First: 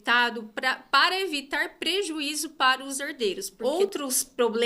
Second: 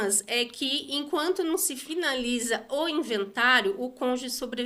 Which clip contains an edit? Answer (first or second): first